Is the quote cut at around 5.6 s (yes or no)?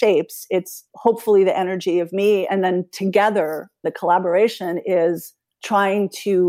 no